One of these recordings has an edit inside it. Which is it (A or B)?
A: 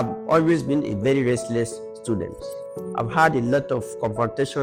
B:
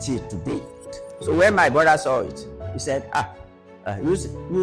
B